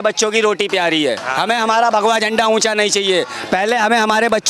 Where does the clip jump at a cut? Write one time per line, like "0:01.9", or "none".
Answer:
none